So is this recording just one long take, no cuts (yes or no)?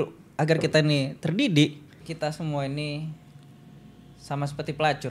no